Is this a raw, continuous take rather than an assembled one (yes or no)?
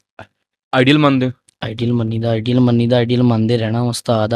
yes